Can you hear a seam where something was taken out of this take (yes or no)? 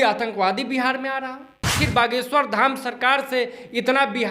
yes